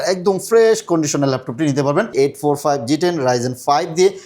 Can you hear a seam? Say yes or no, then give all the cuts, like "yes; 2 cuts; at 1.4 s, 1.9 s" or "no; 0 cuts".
yes; 1 cut; at 2.1 s